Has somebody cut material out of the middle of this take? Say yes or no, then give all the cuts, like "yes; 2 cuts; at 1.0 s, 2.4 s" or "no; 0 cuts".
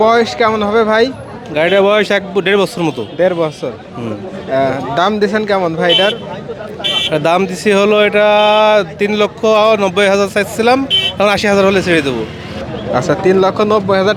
no; 0 cuts